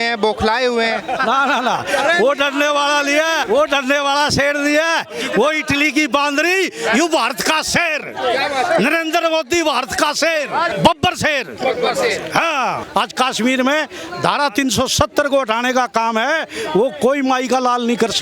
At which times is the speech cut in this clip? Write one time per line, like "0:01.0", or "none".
0:03.4
0:10.7
0:12.8